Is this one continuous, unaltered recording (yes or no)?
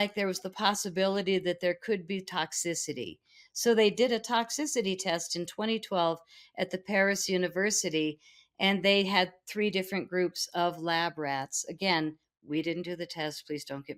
yes